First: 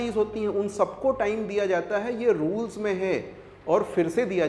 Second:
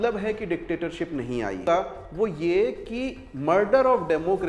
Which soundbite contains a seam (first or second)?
second